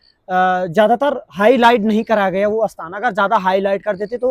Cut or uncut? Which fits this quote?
uncut